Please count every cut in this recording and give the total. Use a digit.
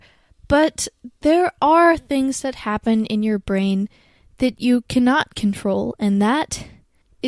0